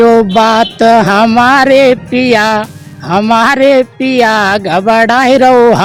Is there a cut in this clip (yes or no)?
no